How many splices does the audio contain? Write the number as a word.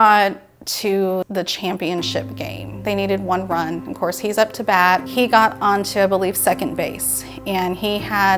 zero